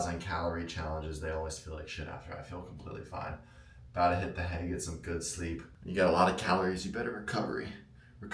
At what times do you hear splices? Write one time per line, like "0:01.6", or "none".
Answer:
0:05.7

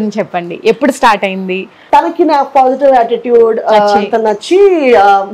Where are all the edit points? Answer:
0:01.8

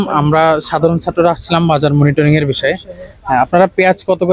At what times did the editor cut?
none

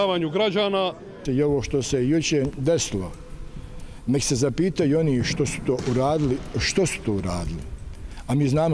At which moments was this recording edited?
0:01.2

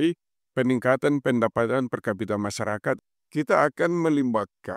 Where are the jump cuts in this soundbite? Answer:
0:03.1

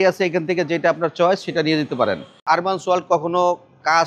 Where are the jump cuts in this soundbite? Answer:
0:02.4

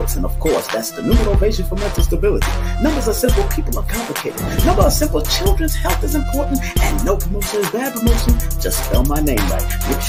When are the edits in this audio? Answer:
none

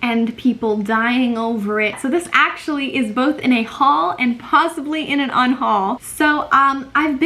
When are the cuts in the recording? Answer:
0:02.0
0:06.1

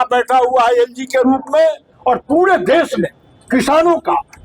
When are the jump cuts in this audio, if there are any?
0:01.9

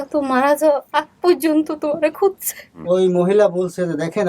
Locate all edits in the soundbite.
0:02.8

